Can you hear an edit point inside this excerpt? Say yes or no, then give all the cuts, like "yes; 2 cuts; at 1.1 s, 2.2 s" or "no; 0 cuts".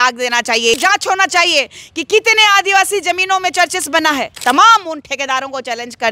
yes; 2 cuts; at 0.8 s, 4.3 s